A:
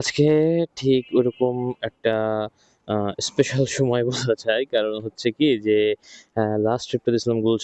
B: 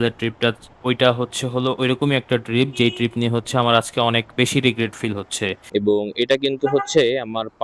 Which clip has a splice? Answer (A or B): B